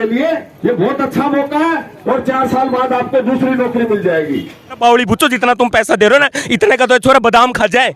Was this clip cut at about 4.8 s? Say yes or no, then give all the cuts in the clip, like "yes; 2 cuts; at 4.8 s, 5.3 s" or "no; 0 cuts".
yes; 1 cut; at 4.8 s